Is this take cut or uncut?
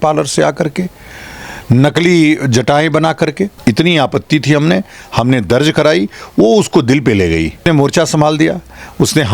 cut